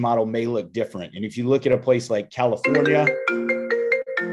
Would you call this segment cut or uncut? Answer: uncut